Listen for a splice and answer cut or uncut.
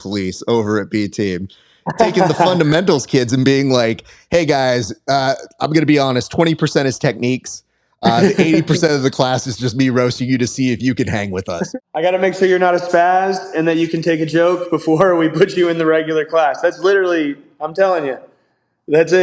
cut